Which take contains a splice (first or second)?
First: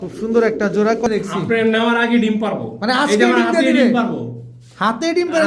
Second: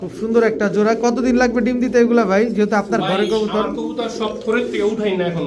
first